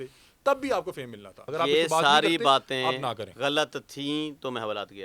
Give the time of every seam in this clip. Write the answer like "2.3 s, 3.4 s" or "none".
1.4 s